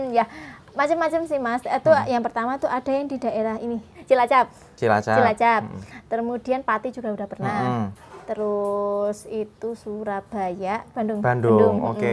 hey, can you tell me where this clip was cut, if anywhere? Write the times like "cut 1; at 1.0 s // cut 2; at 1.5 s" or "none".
cut 1; at 3.9 s // cut 2; at 10.9 s